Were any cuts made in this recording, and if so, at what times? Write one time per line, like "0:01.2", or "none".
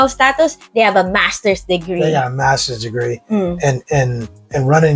none